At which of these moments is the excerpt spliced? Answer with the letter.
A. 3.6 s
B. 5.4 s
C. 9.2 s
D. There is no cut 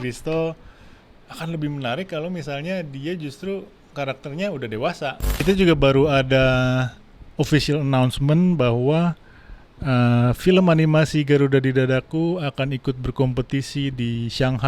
B